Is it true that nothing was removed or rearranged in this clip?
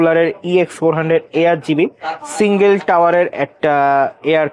yes; 0 cuts

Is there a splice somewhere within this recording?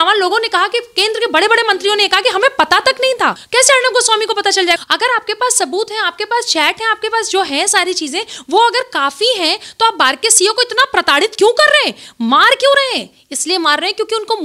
yes; 2 cuts; at 3.4 s, 4.8 s

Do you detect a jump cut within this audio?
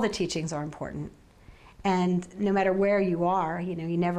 no; 0 cuts

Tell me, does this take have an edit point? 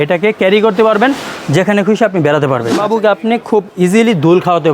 yes; 1 cut; at 2.8 s

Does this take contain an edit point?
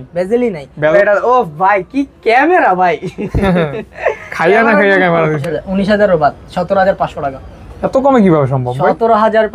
yes; 2 cuts; at 0.9 s, 5.4 s

